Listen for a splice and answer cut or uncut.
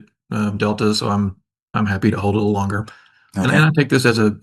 cut